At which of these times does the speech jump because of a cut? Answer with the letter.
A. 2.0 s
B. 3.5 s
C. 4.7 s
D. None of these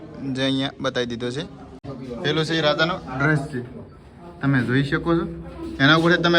A